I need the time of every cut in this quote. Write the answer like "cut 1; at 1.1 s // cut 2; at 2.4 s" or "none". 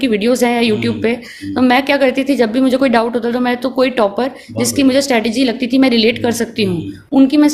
none